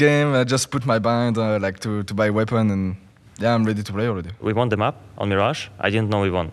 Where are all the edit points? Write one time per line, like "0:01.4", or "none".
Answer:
0:04.3